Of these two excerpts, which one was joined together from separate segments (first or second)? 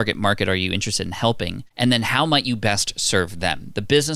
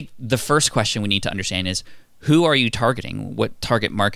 first